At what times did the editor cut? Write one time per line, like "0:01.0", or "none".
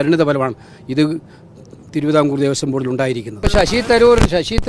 0:03.3